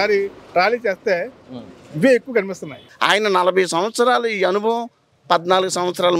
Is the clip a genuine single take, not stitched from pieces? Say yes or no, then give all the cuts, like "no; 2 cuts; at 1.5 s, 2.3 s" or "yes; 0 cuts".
no; 1 cut; at 2.9 s